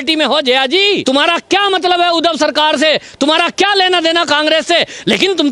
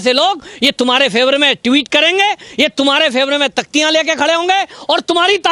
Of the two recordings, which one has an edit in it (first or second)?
first